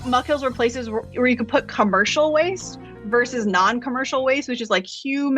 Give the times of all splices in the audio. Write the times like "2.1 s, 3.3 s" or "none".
1.1 s